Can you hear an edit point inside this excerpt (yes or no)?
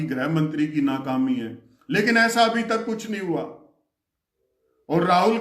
no